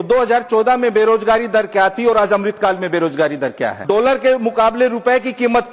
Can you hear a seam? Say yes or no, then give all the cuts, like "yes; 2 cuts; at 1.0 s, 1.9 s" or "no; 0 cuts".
yes; 1 cut; at 3.8 s